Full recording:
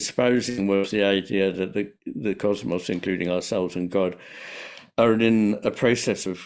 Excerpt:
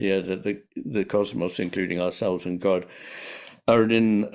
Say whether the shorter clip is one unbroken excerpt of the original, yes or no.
yes